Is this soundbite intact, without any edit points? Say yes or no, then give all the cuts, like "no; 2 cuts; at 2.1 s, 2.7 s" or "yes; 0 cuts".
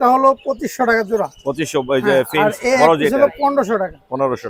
yes; 0 cuts